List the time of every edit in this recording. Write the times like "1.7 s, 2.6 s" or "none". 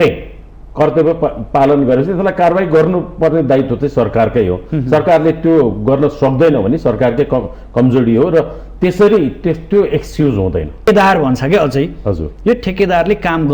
10.9 s